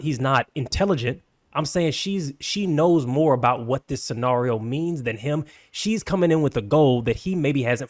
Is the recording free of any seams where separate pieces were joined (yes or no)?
yes